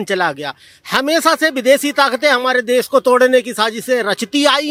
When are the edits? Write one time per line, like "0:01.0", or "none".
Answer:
none